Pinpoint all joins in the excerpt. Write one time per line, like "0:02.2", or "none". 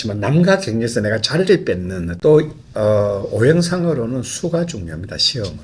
0:02.2